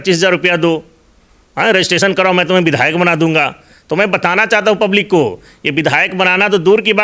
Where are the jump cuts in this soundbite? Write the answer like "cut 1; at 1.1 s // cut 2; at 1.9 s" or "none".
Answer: none